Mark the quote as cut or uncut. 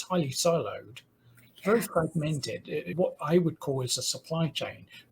cut